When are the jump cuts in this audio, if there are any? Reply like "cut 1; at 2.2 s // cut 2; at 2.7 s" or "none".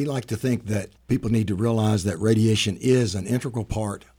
cut 1; at 0.9 s